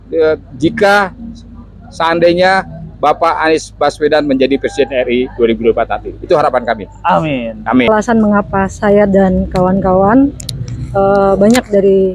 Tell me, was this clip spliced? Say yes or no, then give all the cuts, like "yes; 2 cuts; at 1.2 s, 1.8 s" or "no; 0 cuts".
yes; 1 cut; at 7.9 s